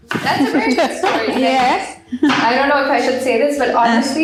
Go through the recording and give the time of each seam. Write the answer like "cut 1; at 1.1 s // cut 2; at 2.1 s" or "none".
none